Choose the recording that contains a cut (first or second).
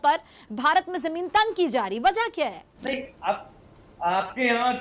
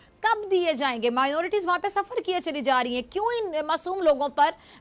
first